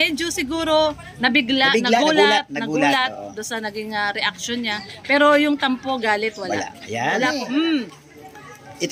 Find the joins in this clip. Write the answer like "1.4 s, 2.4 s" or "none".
7.3 s